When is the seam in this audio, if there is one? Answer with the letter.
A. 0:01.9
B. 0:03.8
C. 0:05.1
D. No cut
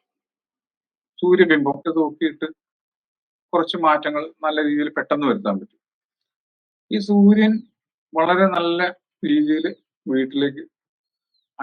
A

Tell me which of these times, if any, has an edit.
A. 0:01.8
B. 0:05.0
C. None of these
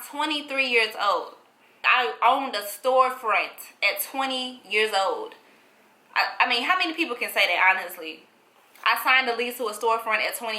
A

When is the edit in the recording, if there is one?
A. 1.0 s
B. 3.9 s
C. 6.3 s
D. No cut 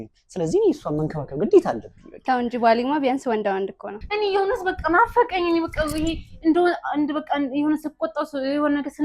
B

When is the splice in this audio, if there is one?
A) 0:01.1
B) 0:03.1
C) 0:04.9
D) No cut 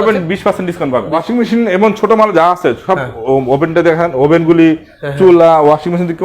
A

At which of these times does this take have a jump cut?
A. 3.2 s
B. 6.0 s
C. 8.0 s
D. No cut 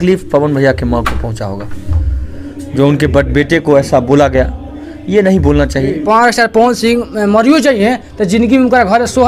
B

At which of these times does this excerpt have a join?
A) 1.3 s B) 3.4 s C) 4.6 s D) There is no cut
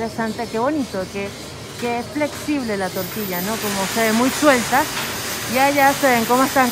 D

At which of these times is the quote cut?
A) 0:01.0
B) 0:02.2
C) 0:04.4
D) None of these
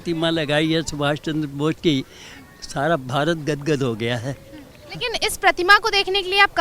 D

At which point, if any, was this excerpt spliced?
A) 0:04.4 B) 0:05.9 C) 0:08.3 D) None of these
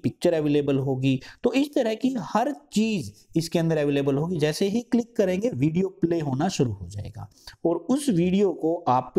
D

